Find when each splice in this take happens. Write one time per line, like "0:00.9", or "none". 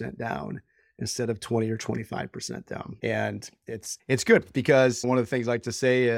0:02.9
0:03.9
0:05.0